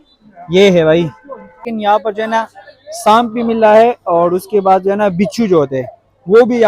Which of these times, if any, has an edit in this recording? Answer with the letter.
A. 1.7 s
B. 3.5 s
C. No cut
A